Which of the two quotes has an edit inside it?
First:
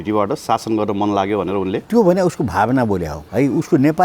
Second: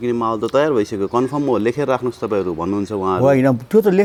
first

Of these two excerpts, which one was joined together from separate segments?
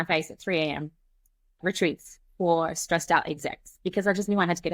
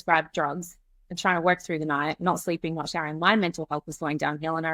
first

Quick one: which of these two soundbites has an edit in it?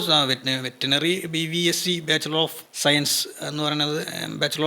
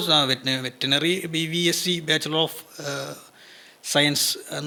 first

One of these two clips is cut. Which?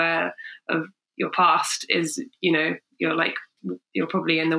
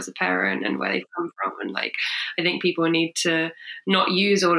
first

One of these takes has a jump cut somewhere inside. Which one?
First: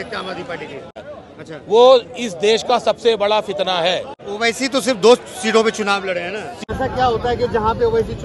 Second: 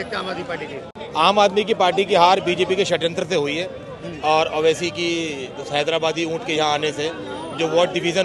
first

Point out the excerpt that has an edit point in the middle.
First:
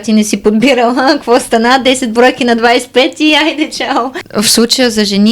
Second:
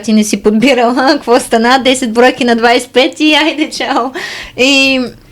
first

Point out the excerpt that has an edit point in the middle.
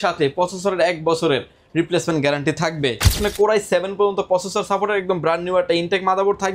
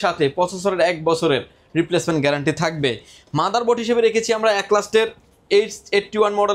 first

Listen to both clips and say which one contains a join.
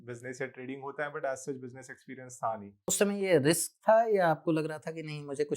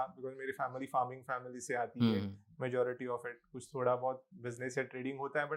first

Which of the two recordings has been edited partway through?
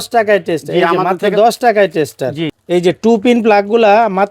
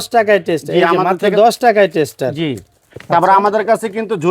first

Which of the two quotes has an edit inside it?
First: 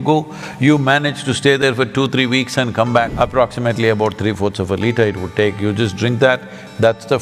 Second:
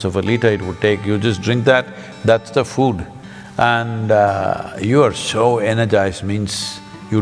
first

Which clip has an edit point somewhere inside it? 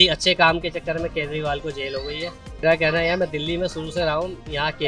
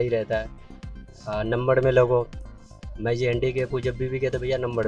first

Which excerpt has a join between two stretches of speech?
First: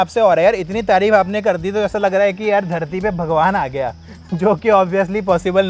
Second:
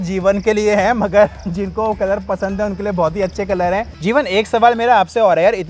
second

